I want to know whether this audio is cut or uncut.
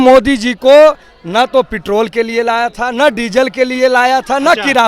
uncut